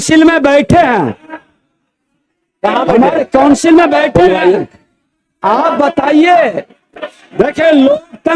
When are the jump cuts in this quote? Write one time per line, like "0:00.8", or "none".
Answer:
none